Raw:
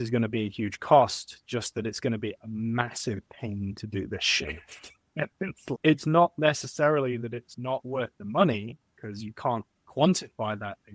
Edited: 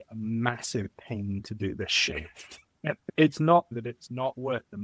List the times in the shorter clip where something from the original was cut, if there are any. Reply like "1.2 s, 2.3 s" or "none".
3.1 s, 3.7 s